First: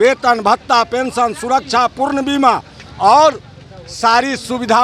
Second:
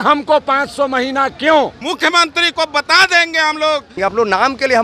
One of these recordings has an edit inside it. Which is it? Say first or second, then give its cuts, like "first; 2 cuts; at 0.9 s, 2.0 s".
second; 2 cuts; at 1.8 s, 4.0 s